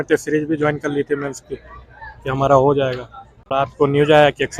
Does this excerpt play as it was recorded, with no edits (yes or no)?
no